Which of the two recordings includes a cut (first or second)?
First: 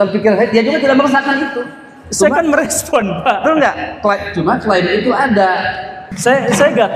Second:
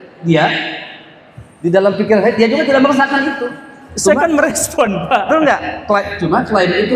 first